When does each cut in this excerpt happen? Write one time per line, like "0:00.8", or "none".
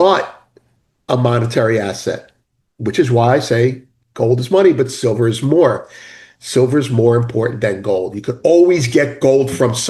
none